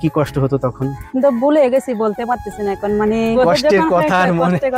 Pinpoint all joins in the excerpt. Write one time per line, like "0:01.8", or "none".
0:01.0
0:03.4